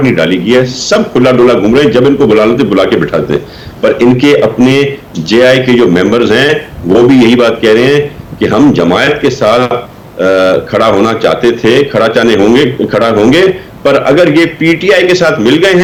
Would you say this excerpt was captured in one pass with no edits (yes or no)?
yes